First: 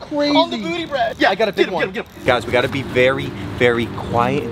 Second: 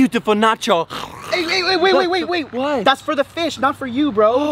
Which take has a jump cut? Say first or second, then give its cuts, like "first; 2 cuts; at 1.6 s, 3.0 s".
first; 2 cuts; at 1.1 s, 2.2 s